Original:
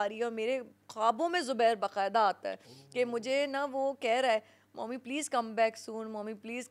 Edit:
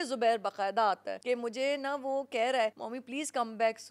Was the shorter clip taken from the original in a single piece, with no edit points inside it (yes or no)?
no